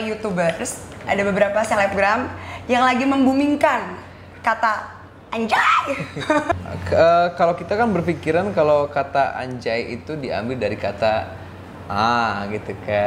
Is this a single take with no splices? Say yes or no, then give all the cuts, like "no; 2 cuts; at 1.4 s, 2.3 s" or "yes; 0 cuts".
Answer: no; 1 cut; at 6.5 s